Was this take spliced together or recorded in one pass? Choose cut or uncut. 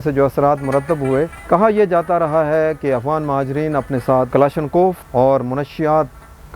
cut